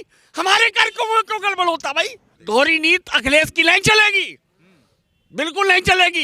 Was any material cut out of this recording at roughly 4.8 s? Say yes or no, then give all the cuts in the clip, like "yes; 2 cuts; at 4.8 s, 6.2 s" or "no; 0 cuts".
no; 1 cut; at 2.3 s